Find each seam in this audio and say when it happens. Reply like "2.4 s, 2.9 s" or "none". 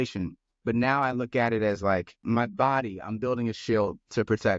2.2 s